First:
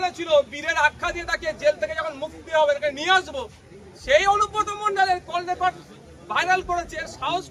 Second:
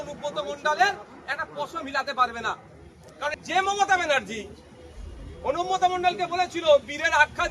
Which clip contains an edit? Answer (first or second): second